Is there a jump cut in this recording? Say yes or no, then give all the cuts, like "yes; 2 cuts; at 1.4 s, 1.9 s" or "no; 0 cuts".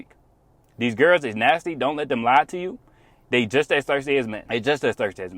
yes; 1 cut; at 4.4 s